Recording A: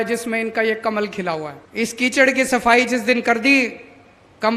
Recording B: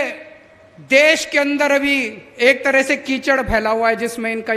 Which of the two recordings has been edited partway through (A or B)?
A